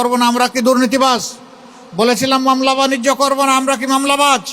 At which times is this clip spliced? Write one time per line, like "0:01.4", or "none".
none